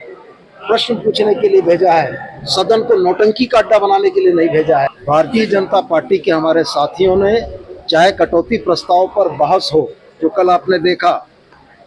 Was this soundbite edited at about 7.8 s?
no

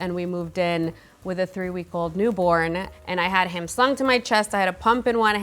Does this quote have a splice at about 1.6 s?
no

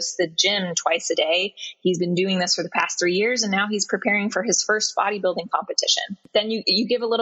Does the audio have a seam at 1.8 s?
no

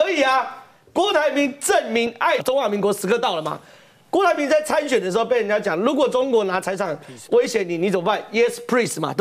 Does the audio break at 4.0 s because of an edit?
no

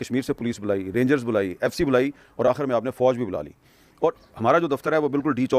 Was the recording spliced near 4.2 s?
yes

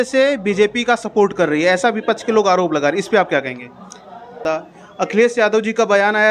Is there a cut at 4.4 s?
yes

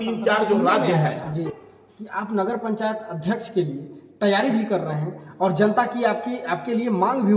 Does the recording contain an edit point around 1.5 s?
yes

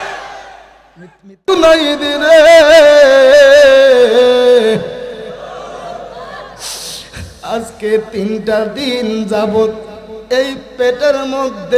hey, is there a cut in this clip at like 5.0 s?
no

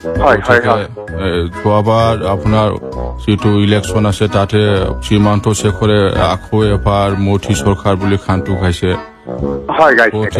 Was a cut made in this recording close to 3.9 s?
no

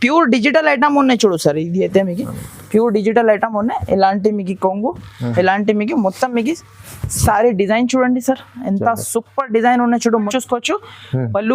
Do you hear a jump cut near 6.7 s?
no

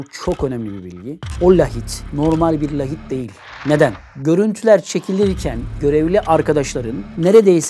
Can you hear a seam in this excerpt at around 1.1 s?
yes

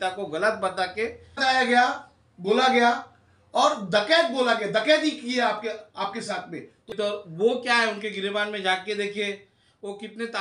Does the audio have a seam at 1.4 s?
yes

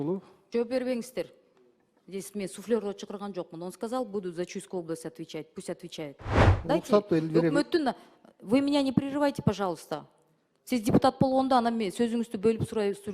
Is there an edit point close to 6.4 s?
yes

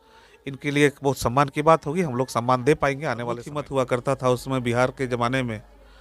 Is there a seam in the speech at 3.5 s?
yes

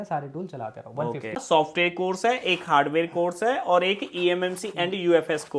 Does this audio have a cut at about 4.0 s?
no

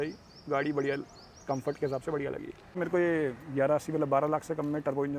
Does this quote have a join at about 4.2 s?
no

